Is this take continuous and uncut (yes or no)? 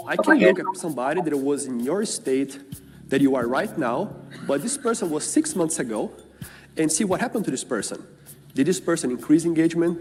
yes